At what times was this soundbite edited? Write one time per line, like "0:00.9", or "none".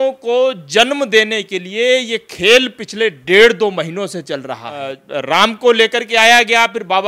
0:05.0